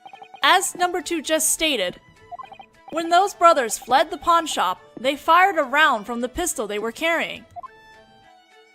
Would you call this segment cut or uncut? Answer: cut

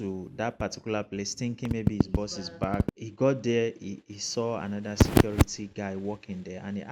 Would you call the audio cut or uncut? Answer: cut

